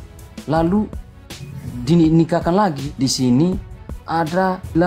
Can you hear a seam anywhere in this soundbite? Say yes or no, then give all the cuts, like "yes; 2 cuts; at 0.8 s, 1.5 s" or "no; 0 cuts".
yes; 1 cut; at 2.9 s